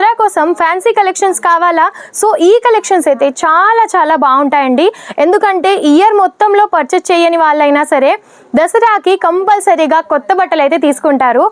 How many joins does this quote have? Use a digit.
0